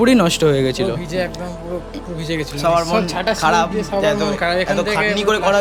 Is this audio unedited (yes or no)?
yes